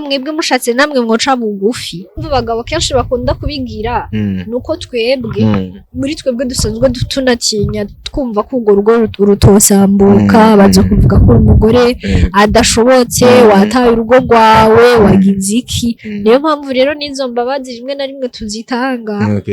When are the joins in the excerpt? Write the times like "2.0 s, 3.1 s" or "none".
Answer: 2.1 s